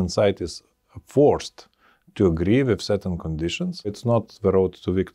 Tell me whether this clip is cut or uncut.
uncut